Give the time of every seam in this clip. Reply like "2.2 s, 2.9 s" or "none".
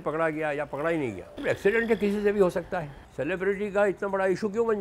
1.3 s, 3.0 s